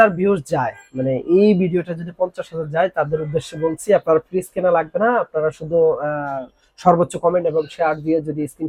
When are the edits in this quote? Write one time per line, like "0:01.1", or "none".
none